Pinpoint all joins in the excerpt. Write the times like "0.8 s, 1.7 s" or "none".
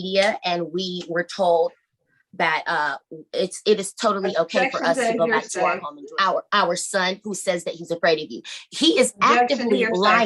5.9 s